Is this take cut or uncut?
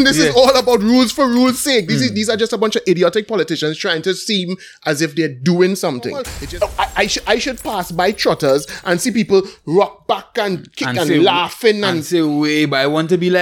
cut